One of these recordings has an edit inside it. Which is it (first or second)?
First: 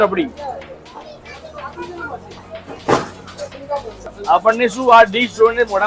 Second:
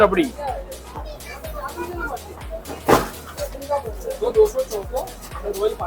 first